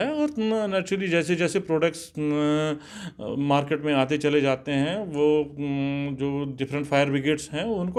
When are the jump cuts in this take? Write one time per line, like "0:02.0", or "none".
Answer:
none